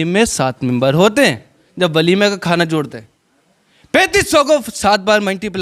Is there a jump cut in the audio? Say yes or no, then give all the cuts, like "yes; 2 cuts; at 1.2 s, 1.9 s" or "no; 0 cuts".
no; 0 cuts